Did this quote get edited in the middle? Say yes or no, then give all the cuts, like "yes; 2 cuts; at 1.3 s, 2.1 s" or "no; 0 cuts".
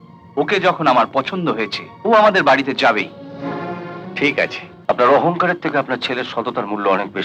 yes; 2 cuts; at 1.8 s, 4.7 s